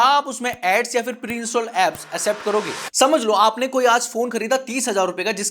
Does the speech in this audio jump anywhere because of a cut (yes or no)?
yes